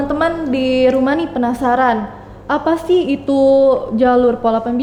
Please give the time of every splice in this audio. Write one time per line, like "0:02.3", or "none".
none